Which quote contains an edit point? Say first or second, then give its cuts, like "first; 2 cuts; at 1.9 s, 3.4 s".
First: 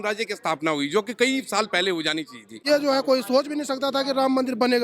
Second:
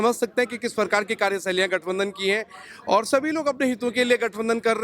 first; 1 cut; at 2.6 s